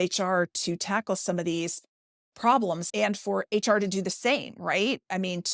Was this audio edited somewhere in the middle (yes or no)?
no